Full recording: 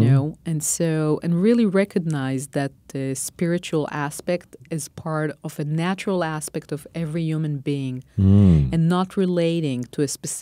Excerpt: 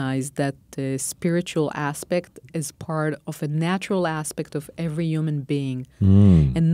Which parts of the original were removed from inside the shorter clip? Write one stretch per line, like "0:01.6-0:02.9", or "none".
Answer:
none